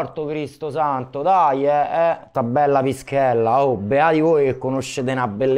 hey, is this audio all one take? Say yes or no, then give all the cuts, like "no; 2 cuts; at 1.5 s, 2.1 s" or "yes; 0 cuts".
no; 1 cut; at 2.3 s